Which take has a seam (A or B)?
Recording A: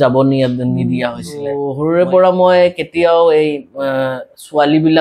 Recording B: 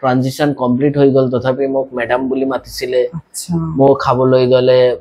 A